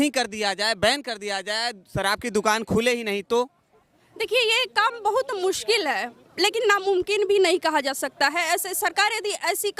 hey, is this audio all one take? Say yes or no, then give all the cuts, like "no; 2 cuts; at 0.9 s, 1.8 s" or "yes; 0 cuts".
yes; 0 cuts